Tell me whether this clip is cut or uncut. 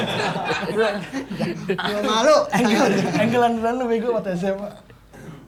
uncut